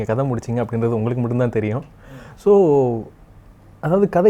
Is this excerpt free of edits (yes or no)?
yes